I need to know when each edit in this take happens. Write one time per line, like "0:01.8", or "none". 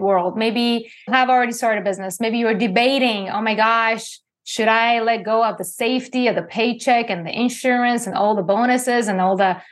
0:01.1